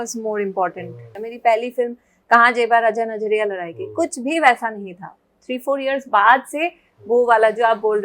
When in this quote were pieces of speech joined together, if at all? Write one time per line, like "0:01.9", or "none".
0:01.1